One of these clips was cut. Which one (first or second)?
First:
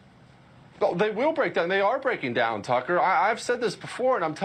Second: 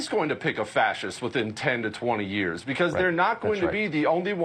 second